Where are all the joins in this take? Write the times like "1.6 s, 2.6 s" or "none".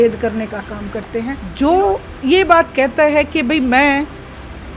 1.4 s